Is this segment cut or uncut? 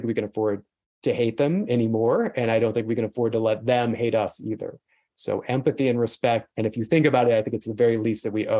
cut